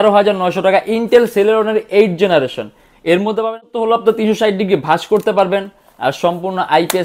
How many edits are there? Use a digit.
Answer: 1